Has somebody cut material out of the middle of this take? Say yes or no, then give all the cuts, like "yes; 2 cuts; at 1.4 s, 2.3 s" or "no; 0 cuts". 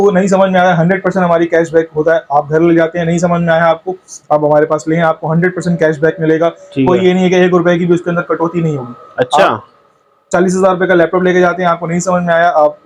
no; 0 cuts